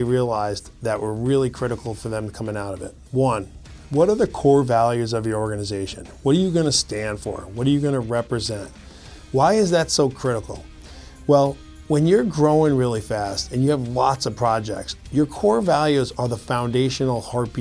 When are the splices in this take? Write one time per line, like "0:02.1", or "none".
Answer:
none